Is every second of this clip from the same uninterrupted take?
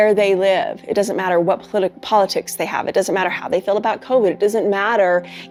yes; 0 cuts

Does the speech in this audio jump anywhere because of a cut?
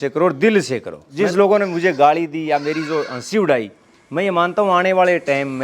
yes; 1 cut; at 1.0 s

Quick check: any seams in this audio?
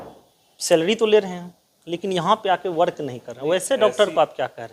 no; 0 cuts

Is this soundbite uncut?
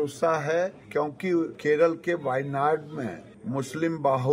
no; 2 cuts; at 1.1 s, 3.3 s

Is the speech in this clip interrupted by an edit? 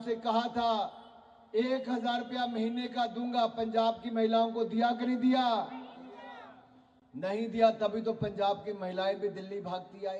no; 0 cuts

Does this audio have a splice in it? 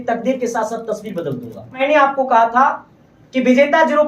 yes; 1 cut; at 1.8 s

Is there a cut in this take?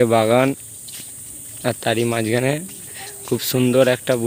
no; 0 cuts

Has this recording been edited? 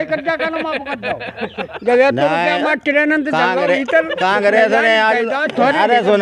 no; 0 cuts

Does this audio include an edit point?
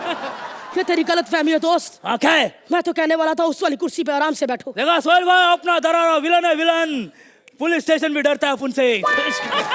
no; 0 cuts

